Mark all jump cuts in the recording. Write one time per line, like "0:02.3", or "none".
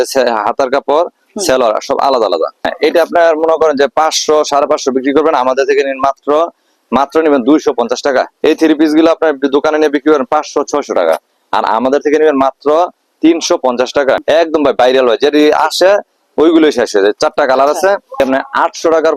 0:02.6
0:08.3
0:14.2
0:18.2